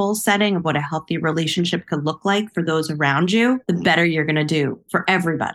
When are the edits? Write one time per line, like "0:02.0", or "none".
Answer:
0:03.6